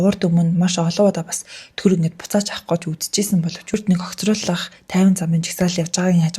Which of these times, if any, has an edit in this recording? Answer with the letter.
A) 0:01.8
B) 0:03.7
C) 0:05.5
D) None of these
B